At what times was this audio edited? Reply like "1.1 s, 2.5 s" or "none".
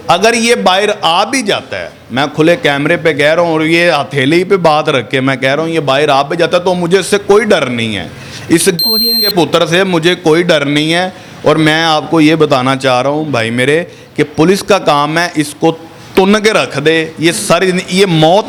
none